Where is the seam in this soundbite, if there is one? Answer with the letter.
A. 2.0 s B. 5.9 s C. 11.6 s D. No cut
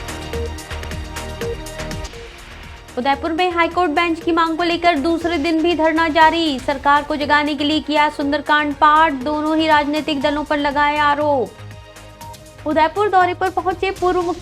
A